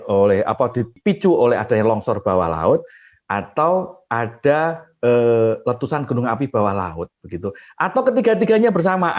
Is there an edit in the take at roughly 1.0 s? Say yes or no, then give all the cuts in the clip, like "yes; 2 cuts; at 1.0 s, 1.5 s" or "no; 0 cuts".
yes; 1 cut; at 1.0 s